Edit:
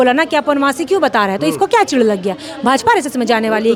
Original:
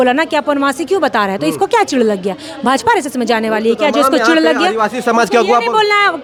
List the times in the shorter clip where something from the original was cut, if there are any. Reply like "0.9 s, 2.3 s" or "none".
none